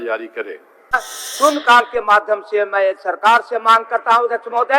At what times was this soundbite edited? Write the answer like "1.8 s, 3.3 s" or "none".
1.1 s